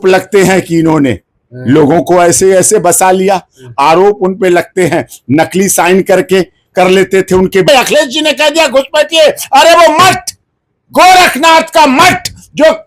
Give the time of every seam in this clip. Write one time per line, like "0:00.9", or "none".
0:07.7